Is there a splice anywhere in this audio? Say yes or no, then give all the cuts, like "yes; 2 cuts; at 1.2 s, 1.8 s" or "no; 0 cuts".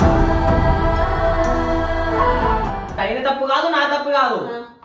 yes; 1 cut; at 3.0 s